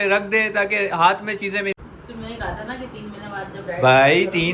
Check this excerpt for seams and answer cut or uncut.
cut